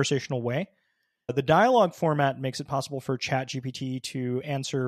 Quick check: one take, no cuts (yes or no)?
no